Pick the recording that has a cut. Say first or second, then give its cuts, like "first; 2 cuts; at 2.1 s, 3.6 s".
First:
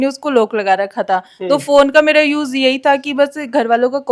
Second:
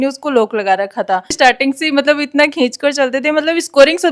second; 1 cut; at 1.3 s